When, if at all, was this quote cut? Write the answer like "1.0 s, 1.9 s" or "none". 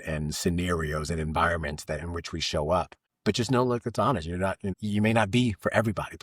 3.0 s, 4.8 s